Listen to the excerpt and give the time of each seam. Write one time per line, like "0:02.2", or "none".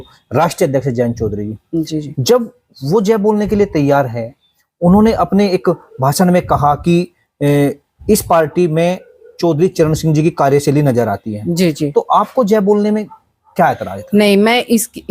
none